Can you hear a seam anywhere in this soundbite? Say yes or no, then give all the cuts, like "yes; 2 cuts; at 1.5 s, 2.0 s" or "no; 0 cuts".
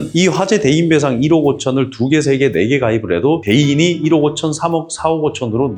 no; 0 cuts